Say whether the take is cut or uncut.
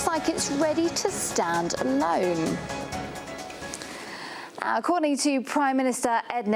cut